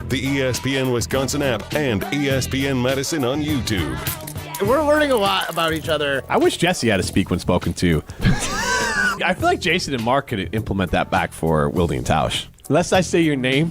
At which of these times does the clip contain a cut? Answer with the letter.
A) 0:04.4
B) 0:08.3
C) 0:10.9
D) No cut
A